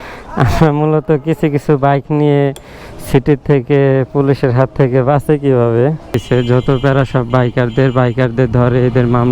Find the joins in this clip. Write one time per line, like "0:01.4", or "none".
0:06.2